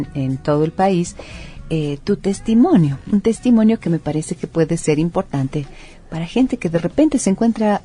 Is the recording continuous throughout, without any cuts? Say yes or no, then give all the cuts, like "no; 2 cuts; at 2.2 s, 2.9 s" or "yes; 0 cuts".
no; 1 cut; at 2.4 s